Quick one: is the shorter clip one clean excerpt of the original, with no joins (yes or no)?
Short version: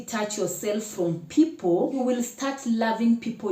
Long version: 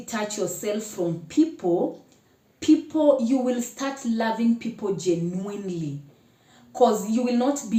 no